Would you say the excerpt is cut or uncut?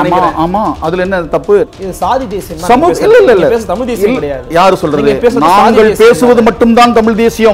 cut